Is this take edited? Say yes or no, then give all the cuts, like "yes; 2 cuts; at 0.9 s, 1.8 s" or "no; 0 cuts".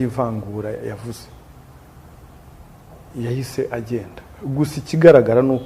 no; 0 cuts